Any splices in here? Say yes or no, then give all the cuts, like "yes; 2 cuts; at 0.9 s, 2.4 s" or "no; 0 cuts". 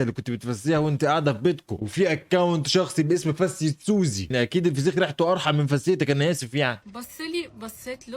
yes; 1 cut; at 6.9 s